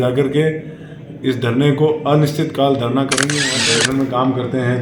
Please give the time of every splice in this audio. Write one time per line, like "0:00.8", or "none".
0:03.6